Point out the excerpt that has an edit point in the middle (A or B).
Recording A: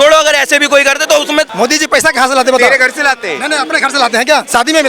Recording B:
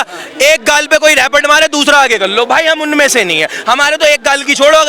A